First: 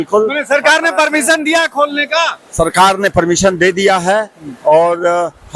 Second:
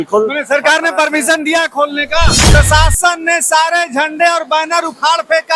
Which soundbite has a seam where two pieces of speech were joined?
second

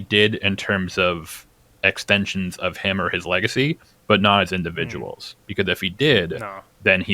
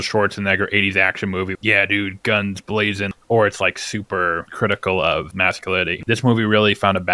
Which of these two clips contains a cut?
second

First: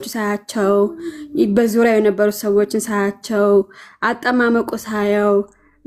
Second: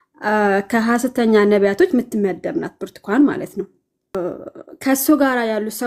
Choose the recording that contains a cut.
second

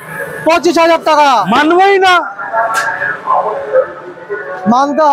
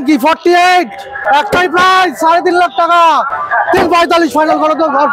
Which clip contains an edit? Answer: second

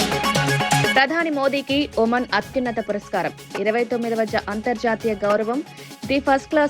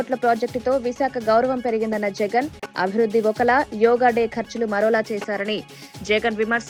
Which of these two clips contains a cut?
first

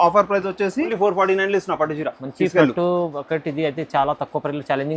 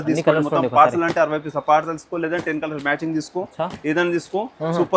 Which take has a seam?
first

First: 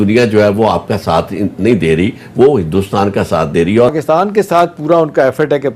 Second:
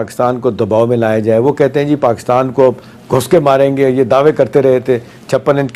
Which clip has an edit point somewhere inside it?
first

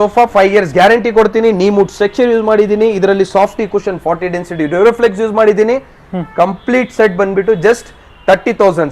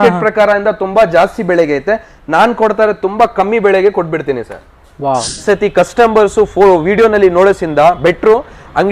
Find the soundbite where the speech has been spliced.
second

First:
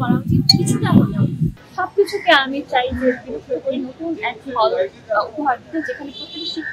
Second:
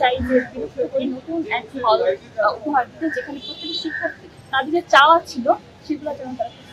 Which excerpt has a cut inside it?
first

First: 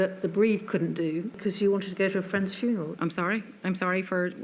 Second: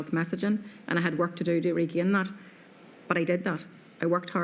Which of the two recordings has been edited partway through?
first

